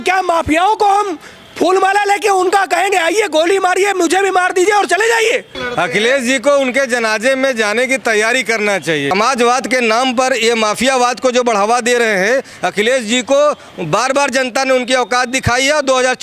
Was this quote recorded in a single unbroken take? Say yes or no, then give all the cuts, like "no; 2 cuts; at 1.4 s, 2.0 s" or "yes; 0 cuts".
no; 2 cuts; at 5.6 s, 9.1 s